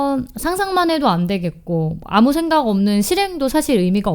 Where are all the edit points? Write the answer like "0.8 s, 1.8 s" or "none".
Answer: none